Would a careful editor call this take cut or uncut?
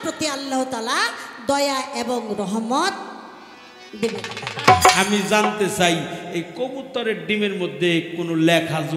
cut